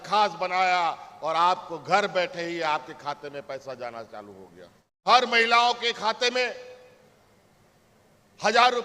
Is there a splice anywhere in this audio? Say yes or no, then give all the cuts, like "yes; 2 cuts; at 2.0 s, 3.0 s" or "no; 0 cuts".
yes; 1 cut; at 5.0 s